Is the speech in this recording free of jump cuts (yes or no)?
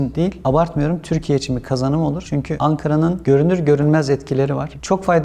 yes